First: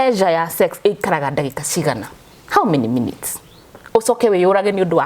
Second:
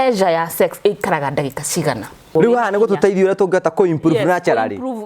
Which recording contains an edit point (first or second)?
second